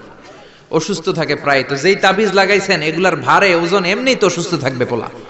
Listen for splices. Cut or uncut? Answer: uncut